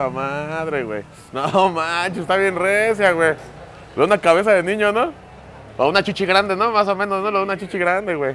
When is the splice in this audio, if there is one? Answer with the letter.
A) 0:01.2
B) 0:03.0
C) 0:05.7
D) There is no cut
A